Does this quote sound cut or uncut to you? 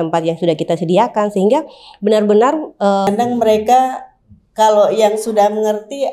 cut